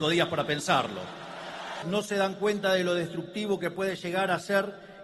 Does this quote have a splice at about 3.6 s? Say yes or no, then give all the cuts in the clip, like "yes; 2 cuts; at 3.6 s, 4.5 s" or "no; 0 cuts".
no; 1 cut; at 1.7 s